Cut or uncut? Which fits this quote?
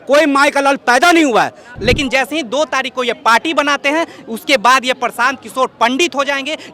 cut